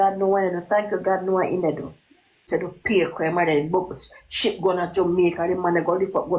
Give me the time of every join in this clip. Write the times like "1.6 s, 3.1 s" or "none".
2.5 s